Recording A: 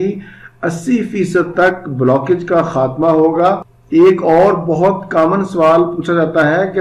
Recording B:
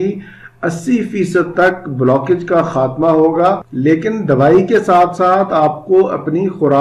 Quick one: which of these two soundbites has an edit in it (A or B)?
B